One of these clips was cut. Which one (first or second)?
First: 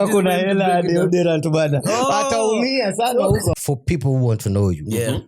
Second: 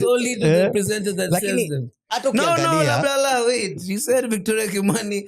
first